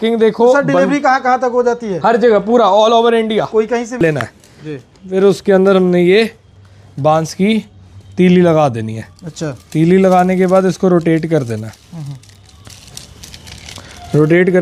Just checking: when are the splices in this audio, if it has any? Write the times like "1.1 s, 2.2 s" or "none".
4.0 s